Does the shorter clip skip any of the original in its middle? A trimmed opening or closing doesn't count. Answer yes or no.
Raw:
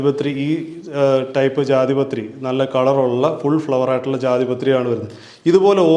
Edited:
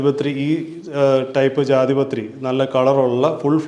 no